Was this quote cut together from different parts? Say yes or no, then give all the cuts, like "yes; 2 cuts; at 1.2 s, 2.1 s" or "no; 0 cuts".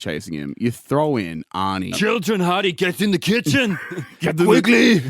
yes; 1 cut; at 1.9 s